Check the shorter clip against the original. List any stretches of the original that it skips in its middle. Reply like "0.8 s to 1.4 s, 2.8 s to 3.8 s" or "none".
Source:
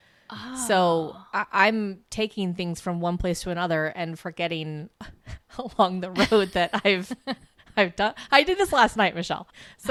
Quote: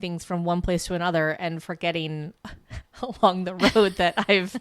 none